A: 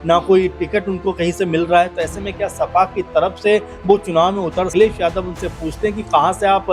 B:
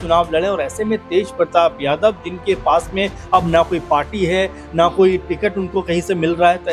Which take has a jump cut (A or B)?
A